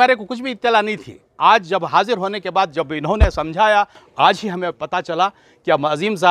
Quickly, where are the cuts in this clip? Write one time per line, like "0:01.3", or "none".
0:04.0